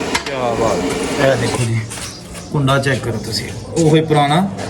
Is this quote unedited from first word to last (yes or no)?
no